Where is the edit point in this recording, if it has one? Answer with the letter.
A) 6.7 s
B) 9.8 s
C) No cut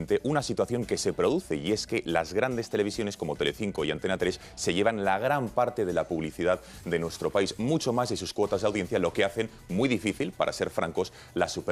A